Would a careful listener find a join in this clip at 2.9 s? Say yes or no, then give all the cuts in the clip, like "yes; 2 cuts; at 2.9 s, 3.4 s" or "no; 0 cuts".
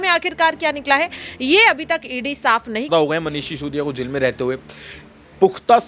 yes; 1 cut; at 2.9 s